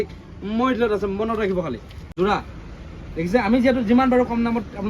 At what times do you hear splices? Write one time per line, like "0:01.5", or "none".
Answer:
0:02.1